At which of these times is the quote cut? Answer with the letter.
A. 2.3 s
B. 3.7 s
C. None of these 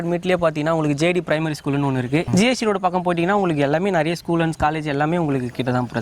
A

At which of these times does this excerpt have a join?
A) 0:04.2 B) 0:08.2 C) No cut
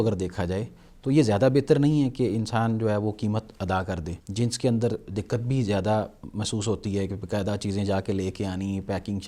A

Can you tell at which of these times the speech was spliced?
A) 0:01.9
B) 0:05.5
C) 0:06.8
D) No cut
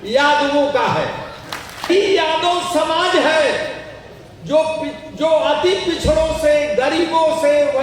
A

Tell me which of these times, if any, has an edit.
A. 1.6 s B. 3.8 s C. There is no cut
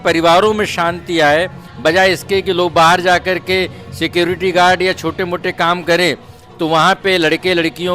A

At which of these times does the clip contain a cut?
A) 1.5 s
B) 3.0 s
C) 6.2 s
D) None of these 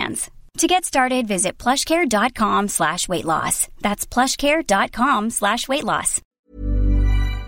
C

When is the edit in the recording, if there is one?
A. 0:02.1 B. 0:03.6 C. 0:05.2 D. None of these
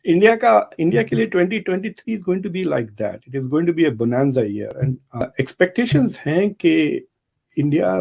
C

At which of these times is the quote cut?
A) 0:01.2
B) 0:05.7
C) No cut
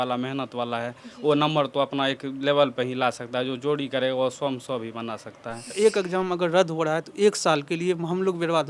B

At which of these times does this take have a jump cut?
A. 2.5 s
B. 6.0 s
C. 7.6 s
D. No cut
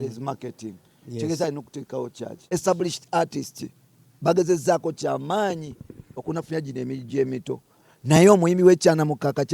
A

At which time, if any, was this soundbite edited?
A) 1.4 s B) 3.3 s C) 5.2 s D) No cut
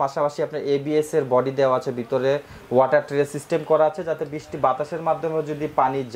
D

